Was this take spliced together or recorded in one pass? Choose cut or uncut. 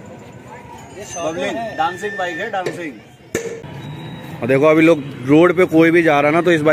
cut